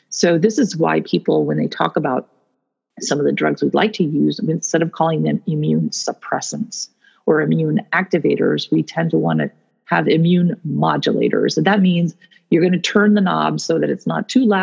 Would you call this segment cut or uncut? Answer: uncut